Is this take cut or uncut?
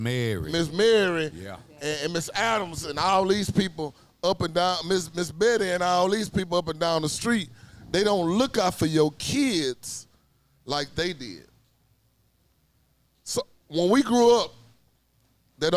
uncut